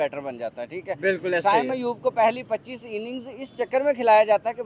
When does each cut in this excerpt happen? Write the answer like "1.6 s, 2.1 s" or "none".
none